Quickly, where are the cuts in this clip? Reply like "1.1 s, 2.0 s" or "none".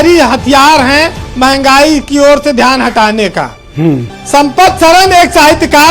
none